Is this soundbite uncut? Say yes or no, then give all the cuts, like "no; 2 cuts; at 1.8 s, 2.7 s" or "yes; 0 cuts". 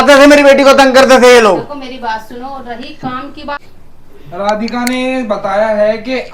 no; 1 cut; at 3.6 s